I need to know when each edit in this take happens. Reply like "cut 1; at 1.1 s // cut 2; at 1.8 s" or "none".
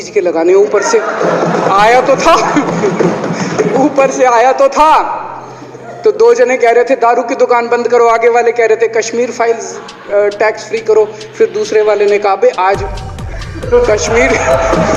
none

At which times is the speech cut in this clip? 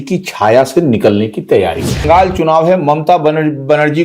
cut 1; at 2.0 s

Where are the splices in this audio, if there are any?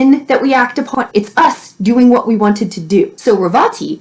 cut 1; at 0.9 s // cut 2; at 3.2 s

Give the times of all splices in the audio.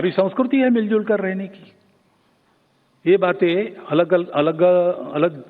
cut 1; at 1.2 s

